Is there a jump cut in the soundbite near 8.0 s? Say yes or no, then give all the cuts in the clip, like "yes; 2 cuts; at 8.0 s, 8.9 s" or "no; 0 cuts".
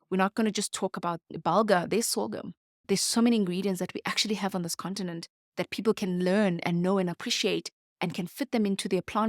no; 1 cut; at 1.3 s